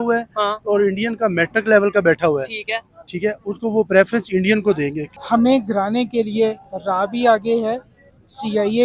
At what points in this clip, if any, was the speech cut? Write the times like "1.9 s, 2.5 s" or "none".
5.1 s